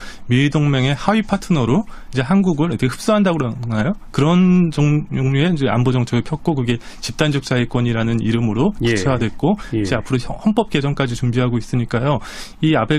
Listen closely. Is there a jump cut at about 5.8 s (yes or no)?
no